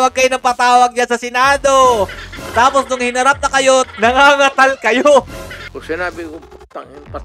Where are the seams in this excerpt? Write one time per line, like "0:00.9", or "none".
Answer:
0:03.9
0:05.6